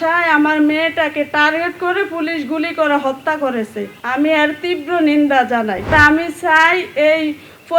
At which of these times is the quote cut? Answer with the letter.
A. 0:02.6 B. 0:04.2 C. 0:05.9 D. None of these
C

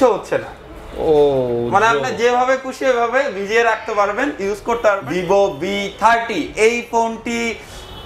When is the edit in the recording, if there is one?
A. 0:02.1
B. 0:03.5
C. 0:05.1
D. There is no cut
C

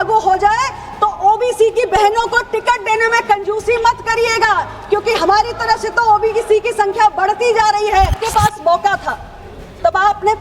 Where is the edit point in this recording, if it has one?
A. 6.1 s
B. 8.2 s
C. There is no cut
B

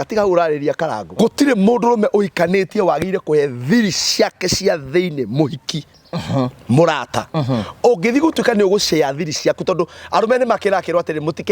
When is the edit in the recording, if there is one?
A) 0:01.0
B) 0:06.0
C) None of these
A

